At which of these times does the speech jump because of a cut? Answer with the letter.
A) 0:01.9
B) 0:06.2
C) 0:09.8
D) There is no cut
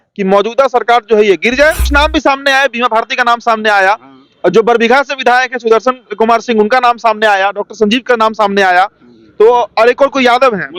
A